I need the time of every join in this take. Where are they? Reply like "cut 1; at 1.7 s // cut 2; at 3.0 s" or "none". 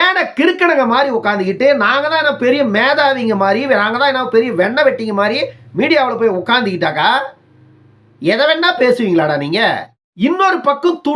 cut 1; at 10.0 s

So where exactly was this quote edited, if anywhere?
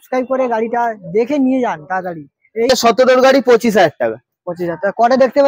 cut 1; at 2.7 s

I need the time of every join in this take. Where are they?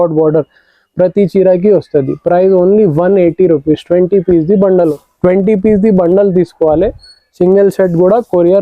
cut 1; at 5.0 s

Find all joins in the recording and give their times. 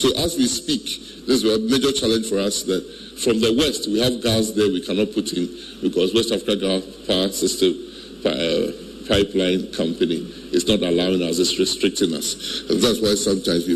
none

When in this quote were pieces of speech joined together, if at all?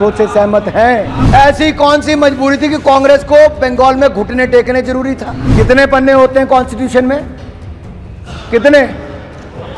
cut 1; at 1.2 s // cut 2; at 5.4 s

